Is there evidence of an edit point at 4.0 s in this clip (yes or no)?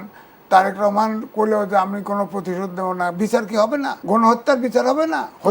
yes